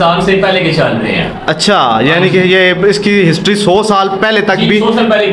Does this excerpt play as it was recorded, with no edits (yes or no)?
yes